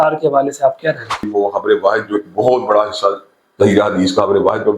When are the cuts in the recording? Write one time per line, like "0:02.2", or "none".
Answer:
0:01.2